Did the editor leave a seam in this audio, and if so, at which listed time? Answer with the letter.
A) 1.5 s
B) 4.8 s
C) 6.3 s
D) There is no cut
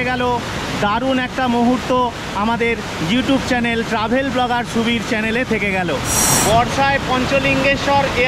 C